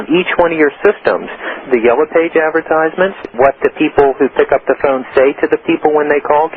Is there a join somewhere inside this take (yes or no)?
yes